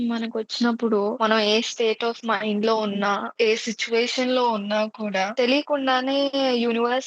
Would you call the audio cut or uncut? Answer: cut